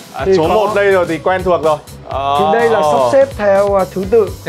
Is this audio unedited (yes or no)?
no